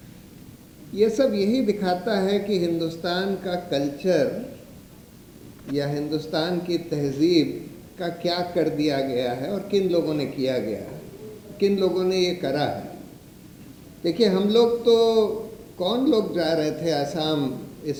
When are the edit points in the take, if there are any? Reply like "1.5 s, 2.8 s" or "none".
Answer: none

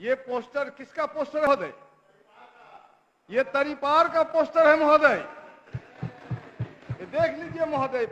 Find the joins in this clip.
1.5 s

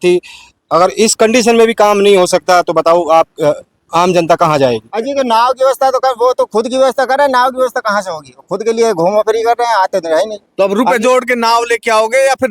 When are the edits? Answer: 4.9 s

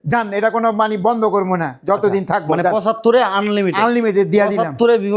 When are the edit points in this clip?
none

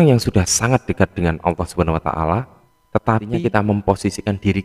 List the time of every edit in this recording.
3.3 s

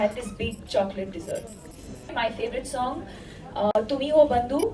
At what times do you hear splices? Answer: 2.1 s

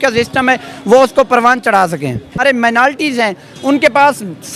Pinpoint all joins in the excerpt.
2.4 s

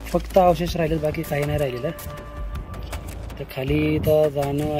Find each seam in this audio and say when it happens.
1.9 s, 3.4 s

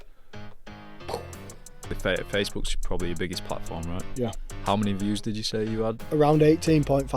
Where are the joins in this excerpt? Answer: 2.0 s, 6.0 s

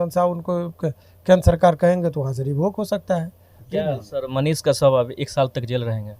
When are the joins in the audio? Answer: 3.5 s

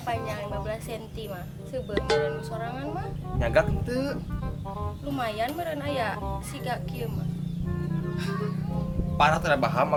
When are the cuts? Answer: none

